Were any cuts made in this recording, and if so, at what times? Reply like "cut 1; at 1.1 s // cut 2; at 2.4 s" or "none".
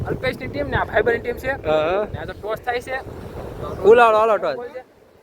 none